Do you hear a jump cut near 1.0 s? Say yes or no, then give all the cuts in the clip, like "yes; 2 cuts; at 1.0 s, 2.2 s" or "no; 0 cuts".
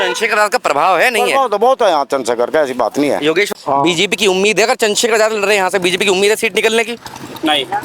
no; 1 cut; at 3.5 s